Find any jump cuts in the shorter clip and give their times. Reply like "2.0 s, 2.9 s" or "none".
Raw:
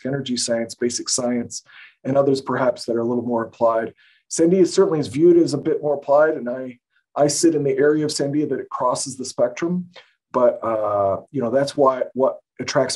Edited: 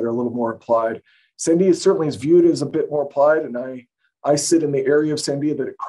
none